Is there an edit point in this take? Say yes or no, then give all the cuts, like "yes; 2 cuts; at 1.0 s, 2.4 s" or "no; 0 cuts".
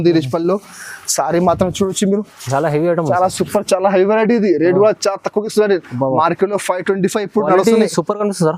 no; 0 cuts